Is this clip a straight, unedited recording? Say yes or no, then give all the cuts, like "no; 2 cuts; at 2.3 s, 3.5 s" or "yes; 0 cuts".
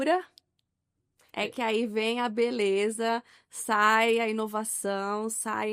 yes; 0 cuts